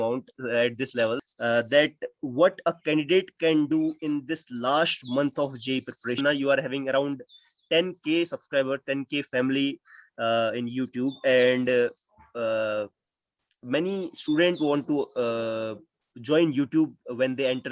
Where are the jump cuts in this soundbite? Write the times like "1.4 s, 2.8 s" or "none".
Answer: 1.3 s, 6.2 s